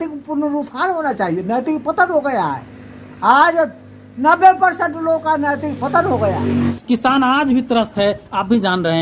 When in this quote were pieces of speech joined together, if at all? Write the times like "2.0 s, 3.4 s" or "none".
6.6 s